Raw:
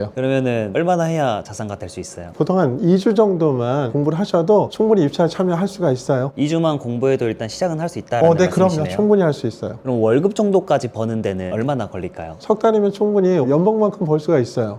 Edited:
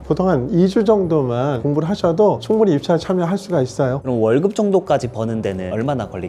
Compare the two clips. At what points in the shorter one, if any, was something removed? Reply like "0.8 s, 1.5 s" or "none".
4.0 s